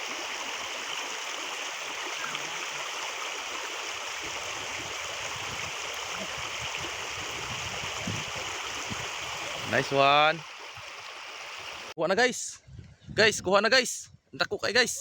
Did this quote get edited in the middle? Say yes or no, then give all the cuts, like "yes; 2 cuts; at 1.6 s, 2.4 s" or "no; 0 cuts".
yes; 1 cut; at 11.9 s